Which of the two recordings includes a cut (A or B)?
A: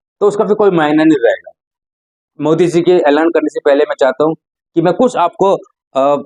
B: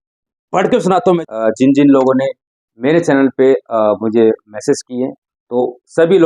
B